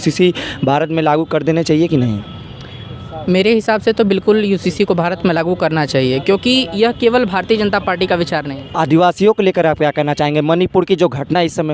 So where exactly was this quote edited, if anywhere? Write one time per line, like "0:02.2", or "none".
0:08.6